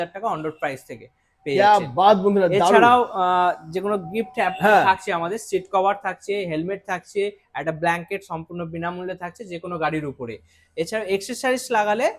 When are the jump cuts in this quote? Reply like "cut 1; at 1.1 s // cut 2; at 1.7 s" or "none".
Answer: none